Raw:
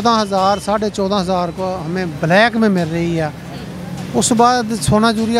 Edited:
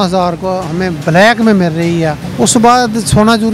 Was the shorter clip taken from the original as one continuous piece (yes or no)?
no